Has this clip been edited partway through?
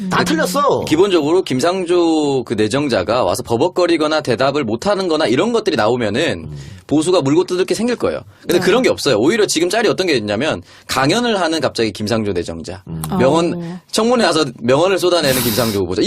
yes; 1 cut; at 7.5 s

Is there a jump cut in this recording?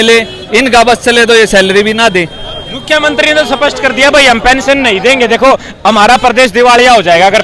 no; 0 cuts

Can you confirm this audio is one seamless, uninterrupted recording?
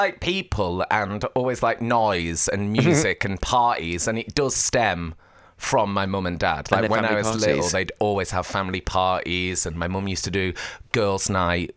yes; 0 cuts

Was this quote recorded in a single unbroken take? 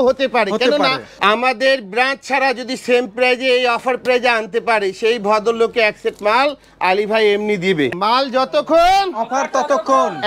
no; 2 cuts; at 1.1 s, 7.9 s

